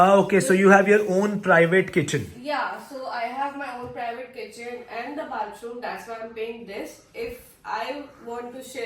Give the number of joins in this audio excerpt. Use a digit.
0